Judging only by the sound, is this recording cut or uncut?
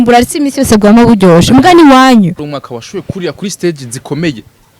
cut